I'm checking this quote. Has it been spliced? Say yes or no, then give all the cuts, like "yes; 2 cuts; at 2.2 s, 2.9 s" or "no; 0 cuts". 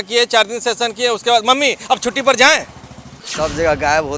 yes; 1 cut; at 3.2 s